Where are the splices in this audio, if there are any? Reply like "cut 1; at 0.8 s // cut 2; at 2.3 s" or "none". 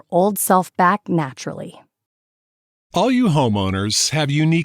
cut 1; at 2.2 s